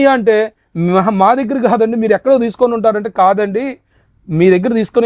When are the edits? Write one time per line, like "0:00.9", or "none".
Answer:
none